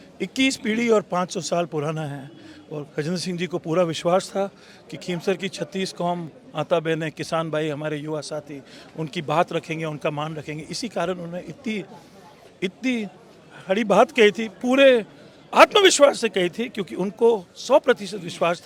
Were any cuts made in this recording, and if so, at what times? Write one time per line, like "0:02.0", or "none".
none